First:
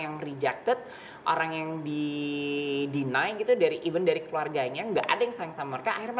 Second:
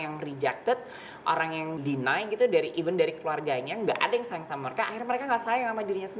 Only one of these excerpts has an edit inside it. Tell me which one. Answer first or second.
second